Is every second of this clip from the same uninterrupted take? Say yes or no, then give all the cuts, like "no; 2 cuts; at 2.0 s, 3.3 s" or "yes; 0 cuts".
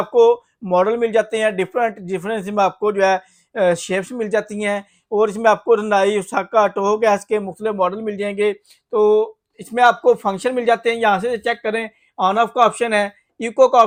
yes; 0 cuts